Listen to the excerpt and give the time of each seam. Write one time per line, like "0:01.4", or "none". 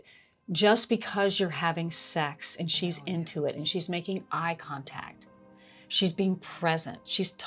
none